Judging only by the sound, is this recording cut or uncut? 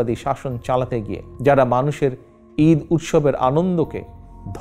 cut